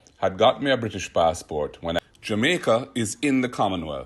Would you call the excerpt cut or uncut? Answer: cut